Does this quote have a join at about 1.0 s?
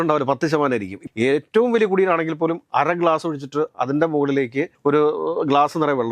yes; 1 cut; at 1.0 s

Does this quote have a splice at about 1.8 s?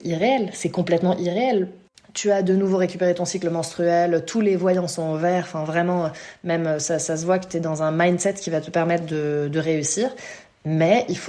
yes; 1 cut; at 1.8 s

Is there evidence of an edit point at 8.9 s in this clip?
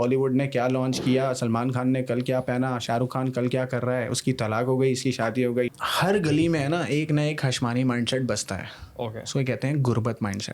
no; 1 cut; at 5.7 s

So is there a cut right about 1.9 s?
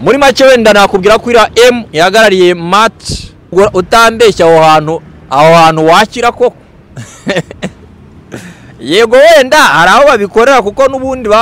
no; 1 cut; at 3.5 s

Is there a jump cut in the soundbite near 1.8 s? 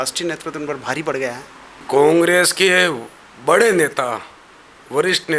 yes; 1 cut; at 1.8 s

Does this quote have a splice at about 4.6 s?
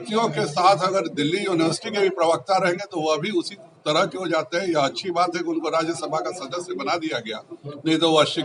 no; 0 cuts

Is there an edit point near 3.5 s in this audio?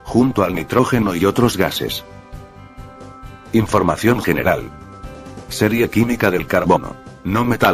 yes; 1 cut; at 3.5 s

